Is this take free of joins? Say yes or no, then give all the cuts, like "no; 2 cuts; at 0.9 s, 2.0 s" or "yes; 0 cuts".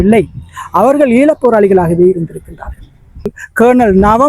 no; 1 cut; at 3.4 s